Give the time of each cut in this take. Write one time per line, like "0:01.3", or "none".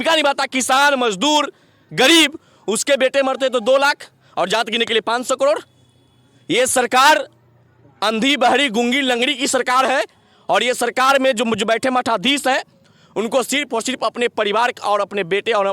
none